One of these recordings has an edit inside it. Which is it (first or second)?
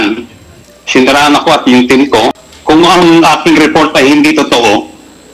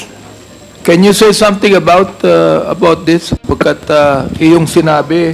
first